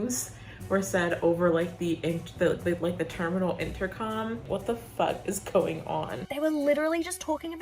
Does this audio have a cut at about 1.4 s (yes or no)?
no